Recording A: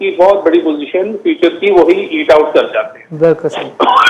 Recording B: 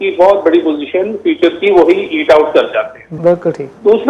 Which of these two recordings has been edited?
B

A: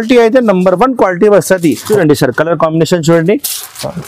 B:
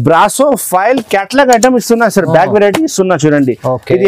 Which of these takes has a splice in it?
A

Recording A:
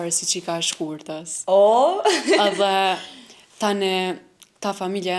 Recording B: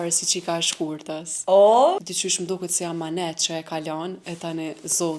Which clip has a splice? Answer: B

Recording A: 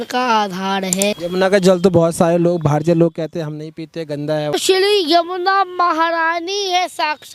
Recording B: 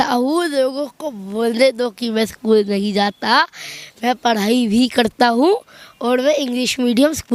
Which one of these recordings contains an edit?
A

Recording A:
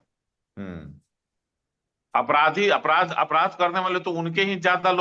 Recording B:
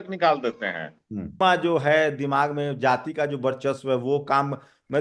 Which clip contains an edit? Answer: B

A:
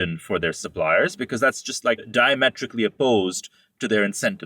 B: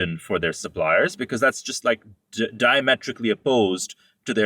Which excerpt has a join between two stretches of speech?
A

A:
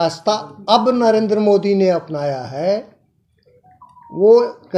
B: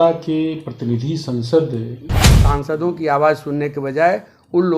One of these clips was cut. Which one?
B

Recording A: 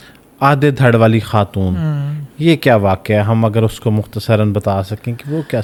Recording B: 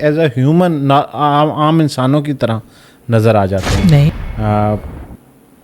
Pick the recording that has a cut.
B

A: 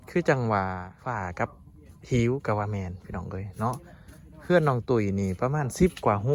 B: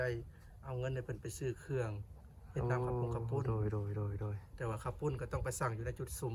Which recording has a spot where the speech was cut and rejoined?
A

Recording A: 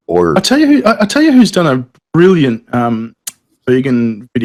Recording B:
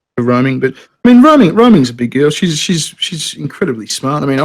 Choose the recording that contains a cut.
B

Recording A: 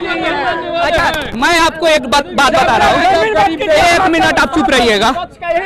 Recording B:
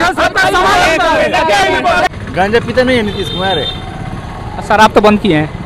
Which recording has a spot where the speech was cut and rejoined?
B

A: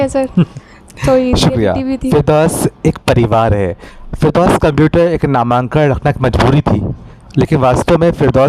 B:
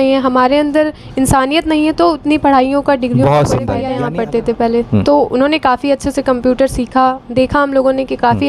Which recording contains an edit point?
B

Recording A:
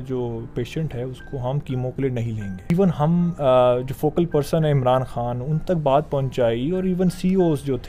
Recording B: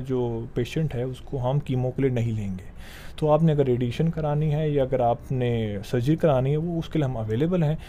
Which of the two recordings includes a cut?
A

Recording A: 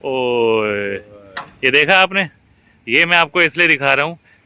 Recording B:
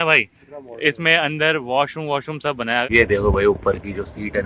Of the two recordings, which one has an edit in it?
B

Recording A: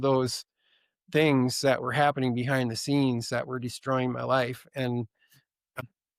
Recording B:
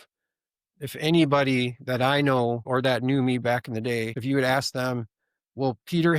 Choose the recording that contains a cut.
B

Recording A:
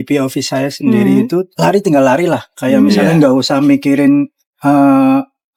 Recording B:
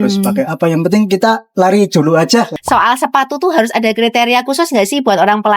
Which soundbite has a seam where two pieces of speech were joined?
B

